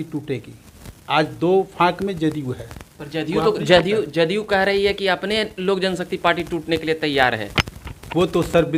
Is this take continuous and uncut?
yes; 0 cuts

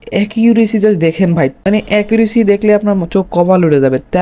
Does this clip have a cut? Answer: yes; 1 cut; at 1.6 s

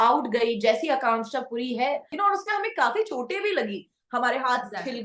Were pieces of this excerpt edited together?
yes; 1 cut; at 2.1 s

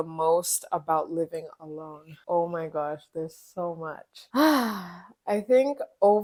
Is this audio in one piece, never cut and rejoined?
yes; 0 cuts

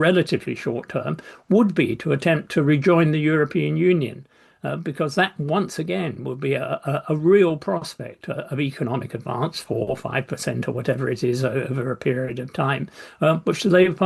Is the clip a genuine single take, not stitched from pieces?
yes; 0 cuts

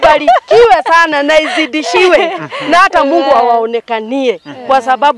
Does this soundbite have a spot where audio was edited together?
no; 0 cuts

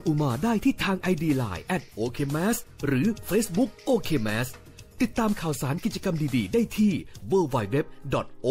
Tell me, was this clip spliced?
no; 0 cuts

